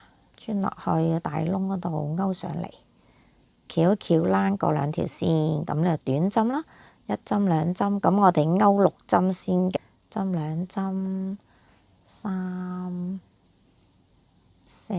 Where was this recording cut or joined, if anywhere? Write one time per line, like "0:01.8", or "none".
0:09.8